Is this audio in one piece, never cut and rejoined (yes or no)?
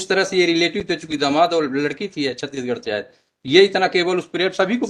yes